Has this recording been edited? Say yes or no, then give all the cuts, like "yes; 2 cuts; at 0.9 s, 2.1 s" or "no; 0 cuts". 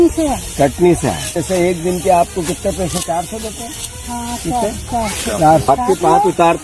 no; 0 cuts